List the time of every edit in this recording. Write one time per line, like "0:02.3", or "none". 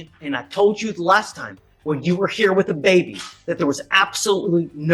none